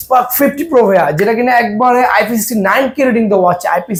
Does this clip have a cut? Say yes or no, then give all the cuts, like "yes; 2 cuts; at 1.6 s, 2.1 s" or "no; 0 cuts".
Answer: no; 0 cuts